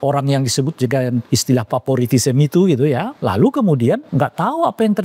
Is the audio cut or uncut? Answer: cut